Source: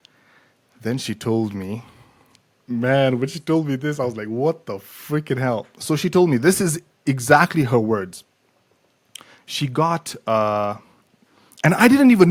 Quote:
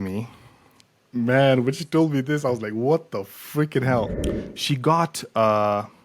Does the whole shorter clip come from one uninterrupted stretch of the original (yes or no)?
no